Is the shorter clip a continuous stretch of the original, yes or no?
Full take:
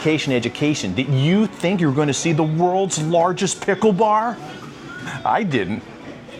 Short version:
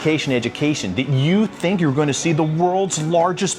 yes